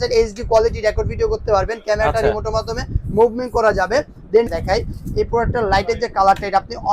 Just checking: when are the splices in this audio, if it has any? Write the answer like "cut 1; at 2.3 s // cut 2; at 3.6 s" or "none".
cut 1; at 4.5 s